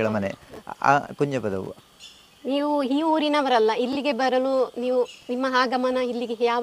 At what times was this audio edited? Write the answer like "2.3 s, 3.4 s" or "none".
1.8 s